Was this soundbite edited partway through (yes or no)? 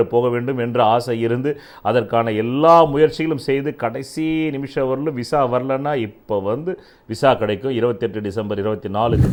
no